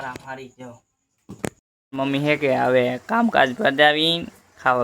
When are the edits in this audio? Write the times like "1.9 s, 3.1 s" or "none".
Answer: 1.7 s